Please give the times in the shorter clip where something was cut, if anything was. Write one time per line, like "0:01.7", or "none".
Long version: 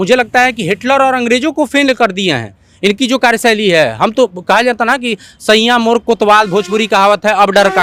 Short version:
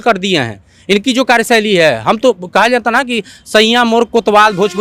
none